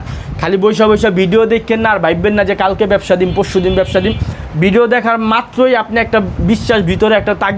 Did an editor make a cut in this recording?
no; 0 cuts

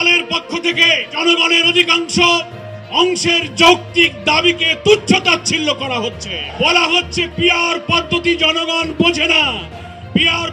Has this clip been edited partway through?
yes; 2 cuts; at 1.2 s, 6.4 s

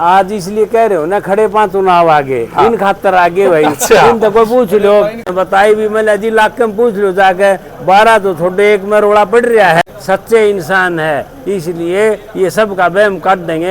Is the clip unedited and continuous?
no; 2 cuts; at 5.2 s, 9.9 s

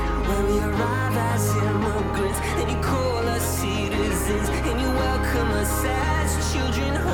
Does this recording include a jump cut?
no; 0 cuts

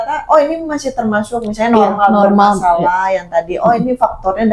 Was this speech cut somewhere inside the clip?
no; 0 cuts

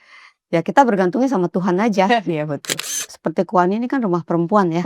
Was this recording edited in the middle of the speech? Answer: yes; 1 cut; at 2.9 s

